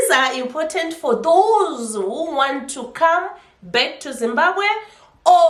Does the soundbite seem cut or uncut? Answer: uncut